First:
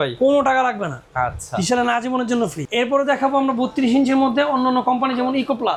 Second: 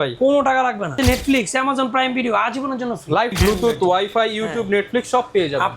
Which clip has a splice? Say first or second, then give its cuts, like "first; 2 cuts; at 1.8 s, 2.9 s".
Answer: second; 2 cuts; at 0.9 s, 3.4 s